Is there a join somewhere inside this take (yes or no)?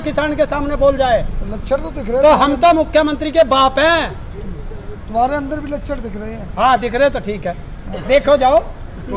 no